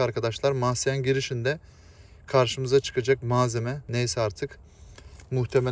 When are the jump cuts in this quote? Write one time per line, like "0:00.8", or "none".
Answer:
none